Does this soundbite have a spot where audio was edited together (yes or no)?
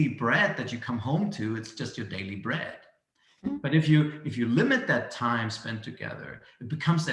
no